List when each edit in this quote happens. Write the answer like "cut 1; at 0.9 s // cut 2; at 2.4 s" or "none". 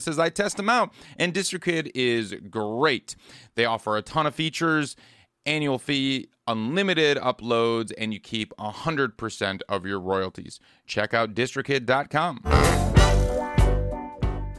none